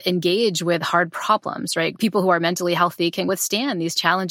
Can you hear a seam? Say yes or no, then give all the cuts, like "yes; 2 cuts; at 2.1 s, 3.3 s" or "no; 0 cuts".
yes; 2 cuts; at 1.9 s, 3.3 s